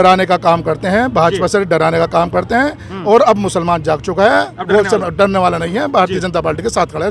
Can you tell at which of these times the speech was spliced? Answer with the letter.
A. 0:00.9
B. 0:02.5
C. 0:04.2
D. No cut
D